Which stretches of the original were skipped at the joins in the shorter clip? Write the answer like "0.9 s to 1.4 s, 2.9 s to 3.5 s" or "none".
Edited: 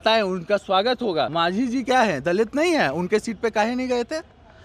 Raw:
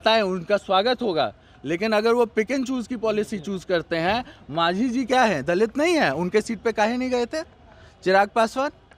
1.3 s to 4.5 s